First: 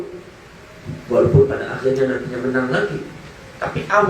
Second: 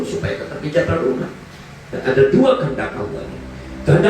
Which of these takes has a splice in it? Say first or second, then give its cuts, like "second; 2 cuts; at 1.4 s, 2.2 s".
second; 2 cuts; at 1.9 s, 2.7 s